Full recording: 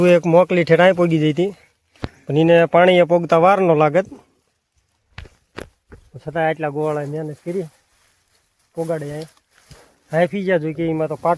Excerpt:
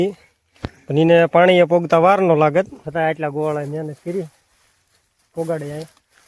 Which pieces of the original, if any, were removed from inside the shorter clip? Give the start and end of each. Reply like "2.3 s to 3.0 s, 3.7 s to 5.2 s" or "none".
4.2 s to 6.2 s